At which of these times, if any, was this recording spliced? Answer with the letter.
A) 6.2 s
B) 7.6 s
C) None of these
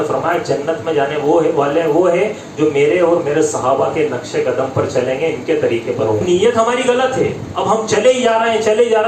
A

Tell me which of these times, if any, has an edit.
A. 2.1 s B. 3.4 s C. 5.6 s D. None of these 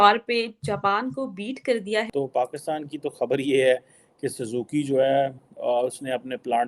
A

